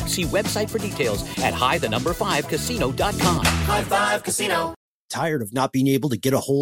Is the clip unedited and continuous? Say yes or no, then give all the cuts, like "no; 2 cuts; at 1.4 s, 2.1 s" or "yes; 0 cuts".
no; 1 cut; at 4.8 s